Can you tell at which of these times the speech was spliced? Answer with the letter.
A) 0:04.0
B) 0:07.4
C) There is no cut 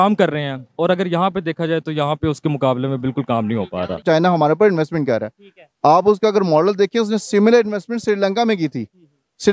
A